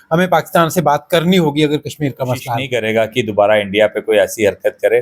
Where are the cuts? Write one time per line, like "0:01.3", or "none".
0:02.6